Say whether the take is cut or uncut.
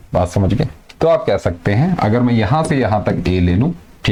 uncut